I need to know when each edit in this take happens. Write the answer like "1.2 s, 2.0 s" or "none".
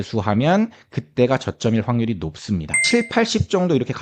2.8 s